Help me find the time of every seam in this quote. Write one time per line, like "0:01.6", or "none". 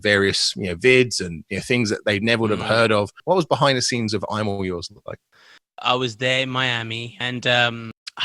0:03.2
0:05.5
0:07.1